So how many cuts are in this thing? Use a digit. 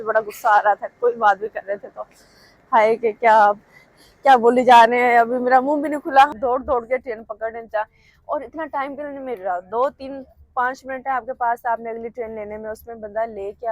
1